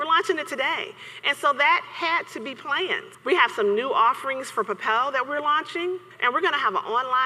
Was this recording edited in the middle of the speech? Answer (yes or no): yes